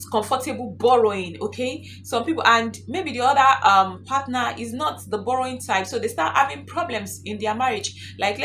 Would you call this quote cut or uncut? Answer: uncut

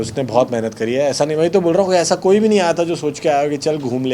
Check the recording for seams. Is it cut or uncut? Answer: uncut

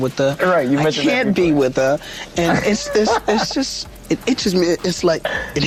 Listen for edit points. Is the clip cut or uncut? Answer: uncut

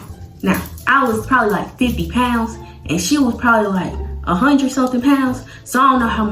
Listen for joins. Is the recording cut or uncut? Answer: uncut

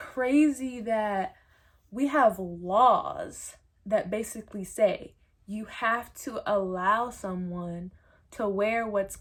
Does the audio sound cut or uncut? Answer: uncut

